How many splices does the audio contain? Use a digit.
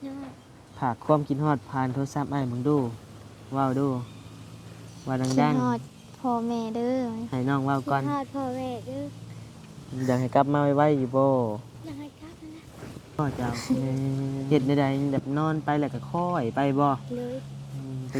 1